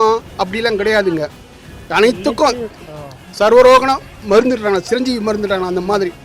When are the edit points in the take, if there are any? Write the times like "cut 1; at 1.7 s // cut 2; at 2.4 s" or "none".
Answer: none